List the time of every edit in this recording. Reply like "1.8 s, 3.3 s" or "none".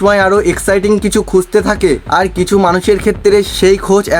none